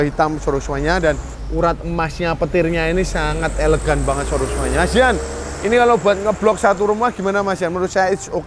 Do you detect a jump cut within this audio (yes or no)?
yes